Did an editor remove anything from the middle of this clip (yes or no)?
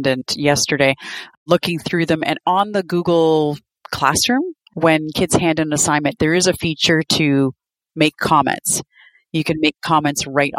no